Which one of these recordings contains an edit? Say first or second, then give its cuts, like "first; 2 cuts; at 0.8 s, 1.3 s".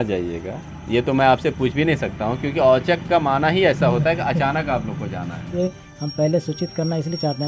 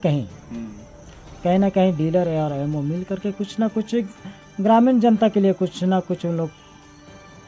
first; 1 cut; at 5.5 s